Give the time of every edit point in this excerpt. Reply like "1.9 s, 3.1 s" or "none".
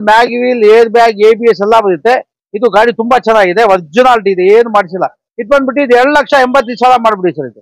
none